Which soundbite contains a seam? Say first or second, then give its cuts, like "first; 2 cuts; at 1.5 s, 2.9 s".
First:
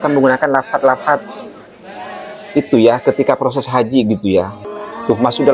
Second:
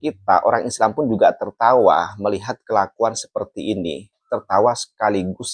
first; 1 cut; at 4.6 s